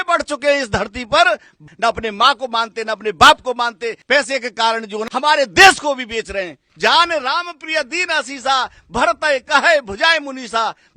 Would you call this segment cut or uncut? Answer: cut